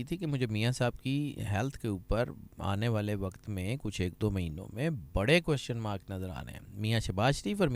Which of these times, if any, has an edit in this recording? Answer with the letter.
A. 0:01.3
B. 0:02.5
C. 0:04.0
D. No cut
D